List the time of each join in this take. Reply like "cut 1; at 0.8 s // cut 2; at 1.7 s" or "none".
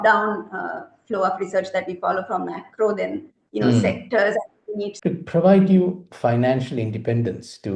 cut 1; at 4.9 s

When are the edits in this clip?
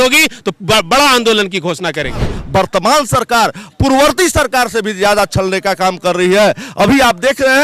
cut 1; at 2.4 s

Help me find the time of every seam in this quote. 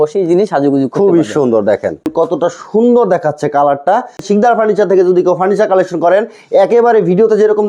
cut 1; at 2.1 s // cut 2; at 4.2 s

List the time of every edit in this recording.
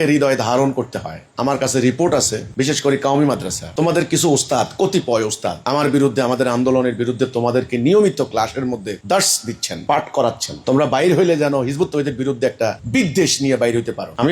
cut 1; at 1.3 s

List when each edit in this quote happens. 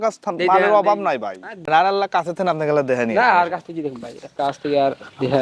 cut 1; at 1.6 s

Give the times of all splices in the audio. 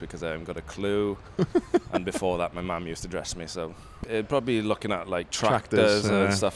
cut 1; at 4.0 s

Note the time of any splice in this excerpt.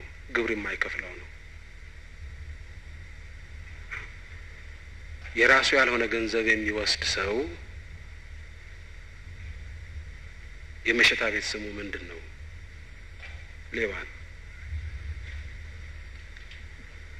none

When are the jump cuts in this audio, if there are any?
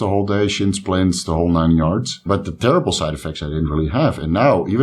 cut 1; at 2.3 s

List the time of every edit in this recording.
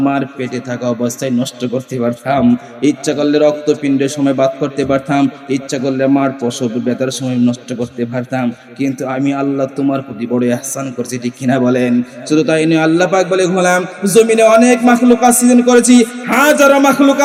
none

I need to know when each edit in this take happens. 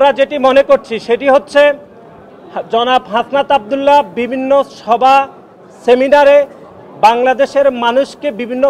none

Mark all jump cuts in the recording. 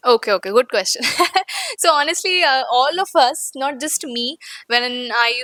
none

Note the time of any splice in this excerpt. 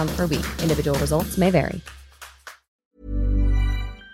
cut 1; at 2.9 s

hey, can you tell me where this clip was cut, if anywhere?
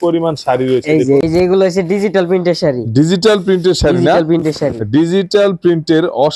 cut 1; at 1.2 s

